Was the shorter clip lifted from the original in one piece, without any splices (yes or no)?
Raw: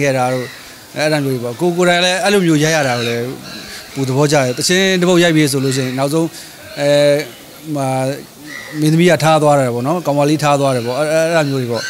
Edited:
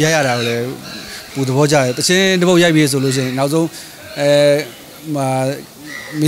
yes